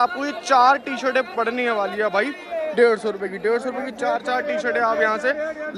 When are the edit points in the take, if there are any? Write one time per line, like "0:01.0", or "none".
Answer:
none